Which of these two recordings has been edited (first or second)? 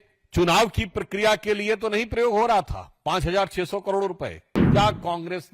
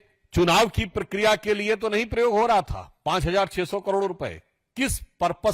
first